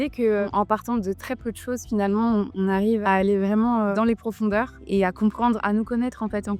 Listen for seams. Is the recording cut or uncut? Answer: uncut